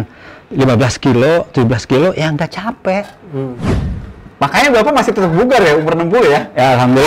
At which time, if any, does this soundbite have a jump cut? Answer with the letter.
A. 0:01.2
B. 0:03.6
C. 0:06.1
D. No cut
B